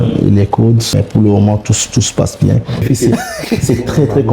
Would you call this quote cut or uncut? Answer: cut